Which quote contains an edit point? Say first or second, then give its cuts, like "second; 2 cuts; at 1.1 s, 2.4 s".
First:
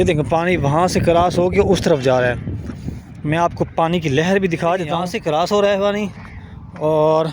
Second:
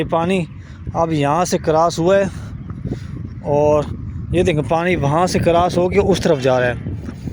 first; 1 cut; at 5.1 s